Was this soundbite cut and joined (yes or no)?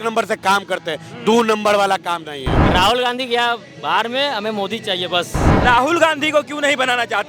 yes